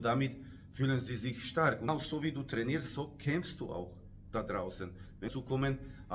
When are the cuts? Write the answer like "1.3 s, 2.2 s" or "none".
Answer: 1.9 s, 5.3 s